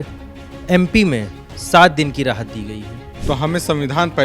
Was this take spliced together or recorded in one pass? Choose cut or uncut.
cut